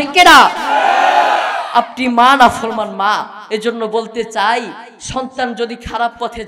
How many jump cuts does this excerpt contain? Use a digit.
0